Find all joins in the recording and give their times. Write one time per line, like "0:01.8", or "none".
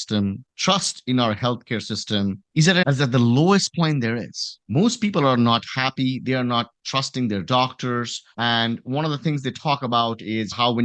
0:08.3